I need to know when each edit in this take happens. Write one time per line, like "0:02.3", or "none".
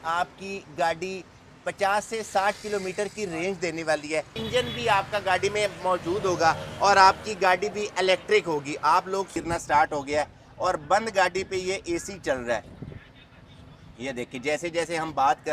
0:04.4
0:09.3